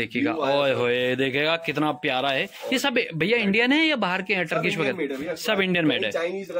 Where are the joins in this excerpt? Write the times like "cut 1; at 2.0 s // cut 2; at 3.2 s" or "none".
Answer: none